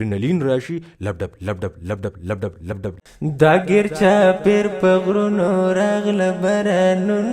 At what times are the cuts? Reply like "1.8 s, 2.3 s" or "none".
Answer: 3.0 s

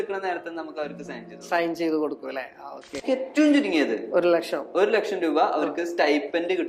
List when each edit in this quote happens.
3.0 s

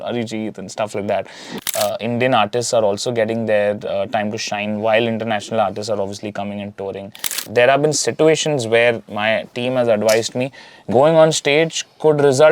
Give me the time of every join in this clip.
1.6 s, 7.4 s

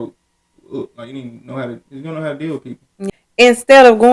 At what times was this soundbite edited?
3.0 s

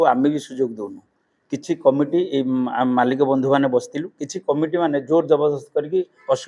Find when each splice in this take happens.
none

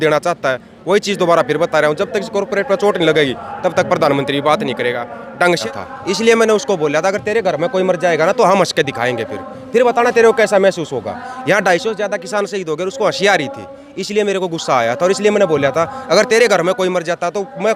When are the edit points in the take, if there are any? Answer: 5.6 s

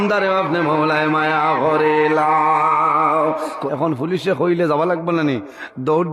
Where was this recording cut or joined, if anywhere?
3.6 s

